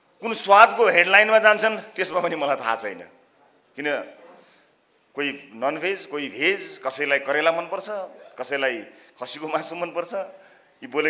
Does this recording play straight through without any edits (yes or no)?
yes